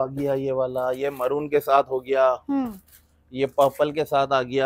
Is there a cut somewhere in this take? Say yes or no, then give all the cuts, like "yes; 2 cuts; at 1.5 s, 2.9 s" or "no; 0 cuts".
no; 0 cuts